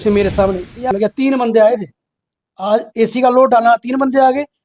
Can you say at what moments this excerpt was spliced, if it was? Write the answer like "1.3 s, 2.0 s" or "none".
0.9 s